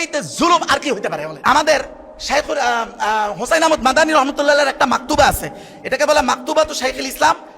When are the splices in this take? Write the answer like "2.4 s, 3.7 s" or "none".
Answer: 1.3 s